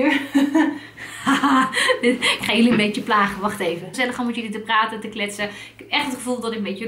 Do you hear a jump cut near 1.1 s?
no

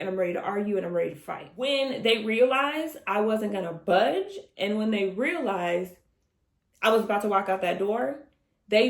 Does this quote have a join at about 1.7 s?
yes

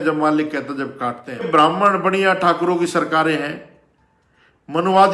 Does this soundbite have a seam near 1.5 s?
yes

